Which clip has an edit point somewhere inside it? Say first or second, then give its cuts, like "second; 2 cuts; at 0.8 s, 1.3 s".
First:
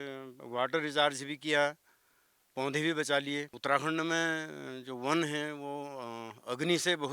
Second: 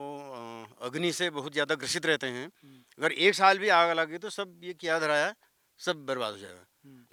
first; 1 cut; at 3.5 s